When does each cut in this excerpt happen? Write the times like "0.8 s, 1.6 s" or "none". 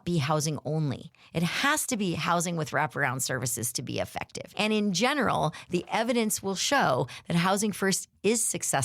4.4 s